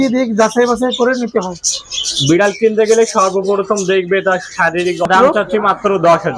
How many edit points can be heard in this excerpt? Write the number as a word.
one